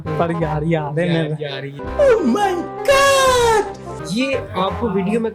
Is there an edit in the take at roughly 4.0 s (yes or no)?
yes